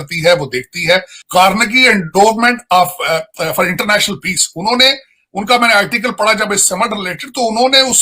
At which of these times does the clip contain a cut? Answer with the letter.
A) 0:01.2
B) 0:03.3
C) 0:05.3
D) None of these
A